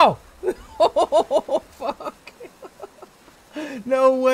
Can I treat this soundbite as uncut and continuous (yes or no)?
yes